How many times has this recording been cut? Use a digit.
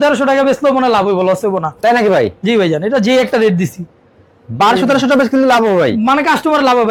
0